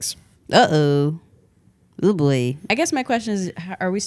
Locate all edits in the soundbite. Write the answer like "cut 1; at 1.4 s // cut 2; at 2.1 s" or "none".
cut 1; at 2.6 s

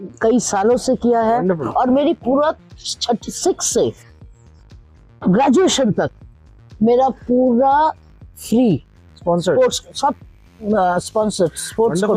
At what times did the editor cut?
none

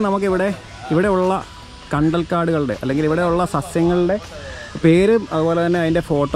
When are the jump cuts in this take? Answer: none

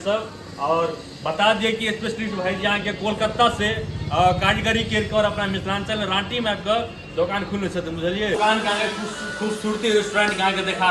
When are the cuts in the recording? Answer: cut 1; at 8.3 s

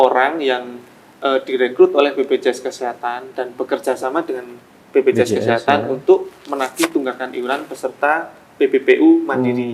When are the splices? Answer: none

